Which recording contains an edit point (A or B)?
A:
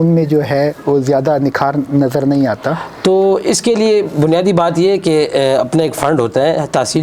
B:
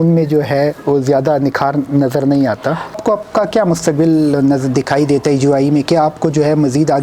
B